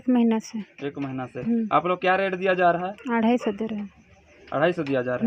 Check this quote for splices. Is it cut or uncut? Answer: uncut